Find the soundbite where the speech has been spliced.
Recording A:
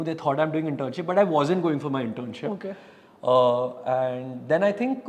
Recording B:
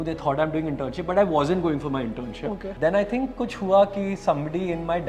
B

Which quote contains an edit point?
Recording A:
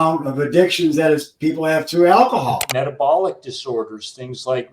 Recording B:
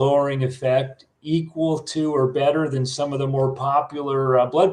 A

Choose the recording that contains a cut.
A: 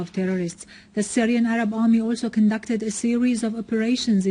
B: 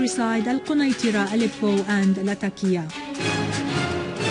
B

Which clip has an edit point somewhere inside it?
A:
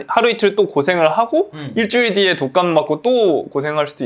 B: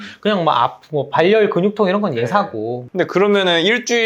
B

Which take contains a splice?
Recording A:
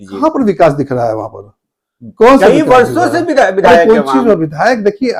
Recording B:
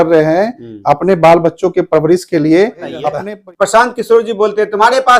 B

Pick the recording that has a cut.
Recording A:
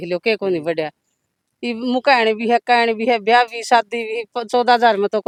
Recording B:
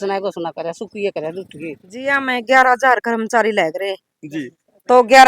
B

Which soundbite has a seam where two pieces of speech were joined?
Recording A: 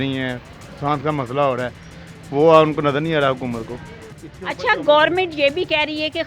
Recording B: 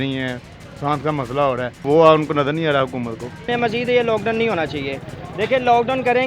B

